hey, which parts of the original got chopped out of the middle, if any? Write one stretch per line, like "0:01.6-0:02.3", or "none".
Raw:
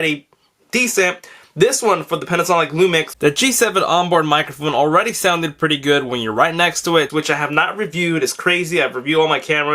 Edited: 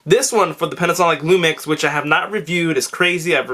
0:03.1-0:07.1